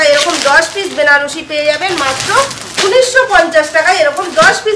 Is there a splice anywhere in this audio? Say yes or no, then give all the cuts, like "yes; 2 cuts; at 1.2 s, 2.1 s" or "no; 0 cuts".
no; 0 cuts